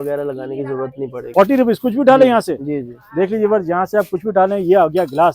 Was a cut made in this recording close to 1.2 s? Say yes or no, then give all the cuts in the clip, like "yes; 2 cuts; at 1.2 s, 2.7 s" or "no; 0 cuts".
yes; 1 cut; at 1.2 s